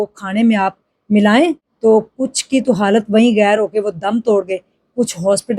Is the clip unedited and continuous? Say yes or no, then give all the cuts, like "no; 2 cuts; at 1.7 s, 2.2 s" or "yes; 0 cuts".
no; 1 cut; at 1.7 s